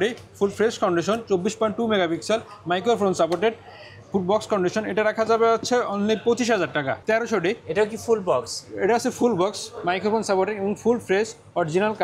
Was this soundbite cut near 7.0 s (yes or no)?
yes